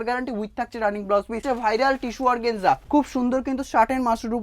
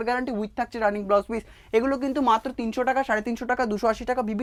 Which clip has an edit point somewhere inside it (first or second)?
first